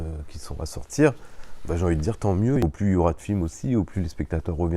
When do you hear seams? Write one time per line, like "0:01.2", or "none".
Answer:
0:02.6